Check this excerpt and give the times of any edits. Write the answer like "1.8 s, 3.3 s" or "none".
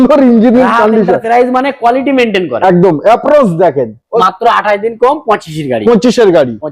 4.2 s